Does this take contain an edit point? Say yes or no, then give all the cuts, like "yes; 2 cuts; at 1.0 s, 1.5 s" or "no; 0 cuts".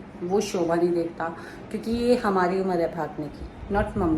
no; 0 cuts